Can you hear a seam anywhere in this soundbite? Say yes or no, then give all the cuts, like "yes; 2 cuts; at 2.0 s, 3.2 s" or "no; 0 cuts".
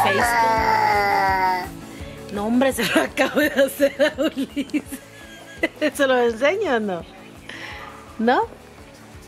no; 0 cuts